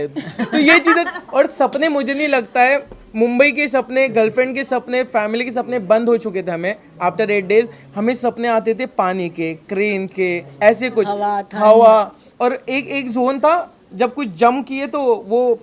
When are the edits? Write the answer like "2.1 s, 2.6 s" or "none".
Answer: none

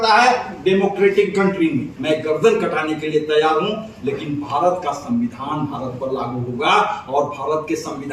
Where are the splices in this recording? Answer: 1.9 s

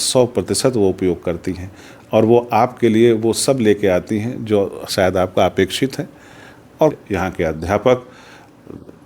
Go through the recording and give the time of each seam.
6.9 s

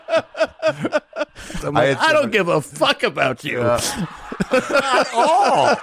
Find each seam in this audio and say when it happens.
1.6 s

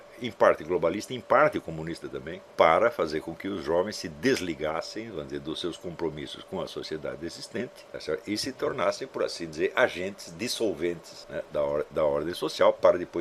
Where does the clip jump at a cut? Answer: 2.4 s, 7.8 s, 11.1 s

